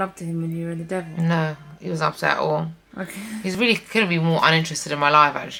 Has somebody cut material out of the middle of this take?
no; 0 cuts

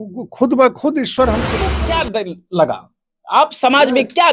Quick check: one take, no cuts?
no; 1 cut; at 1.8 s

